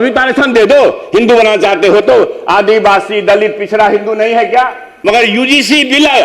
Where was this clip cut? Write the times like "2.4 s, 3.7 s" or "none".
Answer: 4.9 s